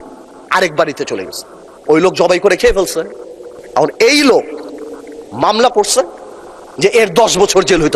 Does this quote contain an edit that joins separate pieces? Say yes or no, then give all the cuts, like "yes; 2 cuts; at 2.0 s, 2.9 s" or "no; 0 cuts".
no; 0 cuts